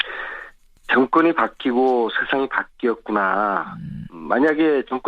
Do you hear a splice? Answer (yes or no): yes